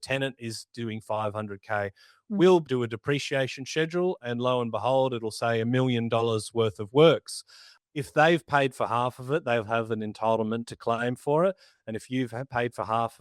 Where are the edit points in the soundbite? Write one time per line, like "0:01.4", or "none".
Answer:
0:02.6
0:07.7